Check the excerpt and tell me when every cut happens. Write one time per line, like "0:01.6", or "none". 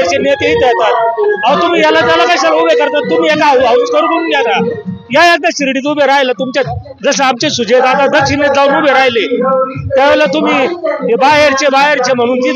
none